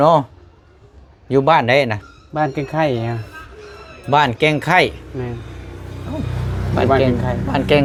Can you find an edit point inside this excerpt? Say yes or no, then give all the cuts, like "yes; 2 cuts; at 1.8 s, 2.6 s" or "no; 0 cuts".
no; 0 cuts